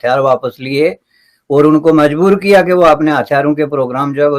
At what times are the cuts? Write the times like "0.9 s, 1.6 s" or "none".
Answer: none